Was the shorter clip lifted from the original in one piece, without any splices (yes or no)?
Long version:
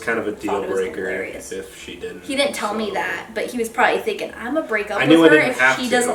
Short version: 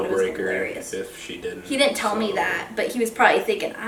yes